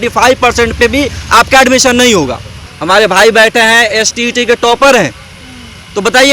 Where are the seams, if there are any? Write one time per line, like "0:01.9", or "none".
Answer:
0:02.7